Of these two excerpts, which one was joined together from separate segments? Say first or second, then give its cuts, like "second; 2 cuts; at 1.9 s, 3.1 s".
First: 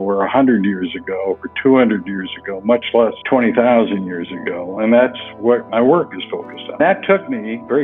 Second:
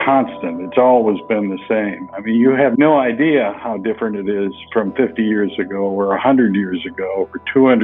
first; 2 cuts; at 4.7 s, 6.8 s